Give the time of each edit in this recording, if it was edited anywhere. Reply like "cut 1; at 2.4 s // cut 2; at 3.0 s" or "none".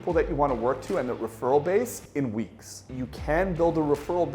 cut 1; at 2.8 s